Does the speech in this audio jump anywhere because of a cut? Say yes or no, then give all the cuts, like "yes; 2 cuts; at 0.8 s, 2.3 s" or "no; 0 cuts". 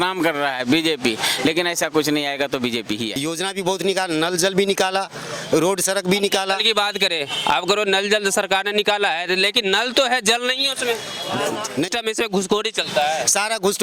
yes; 2 cuts; at 3.1 s, 11.9 s